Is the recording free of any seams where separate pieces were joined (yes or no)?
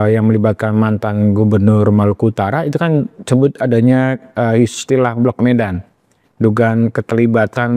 yes